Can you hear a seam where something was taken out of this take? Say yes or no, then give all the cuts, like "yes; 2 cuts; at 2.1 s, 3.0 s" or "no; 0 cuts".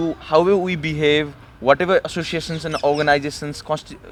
no; 0 cuts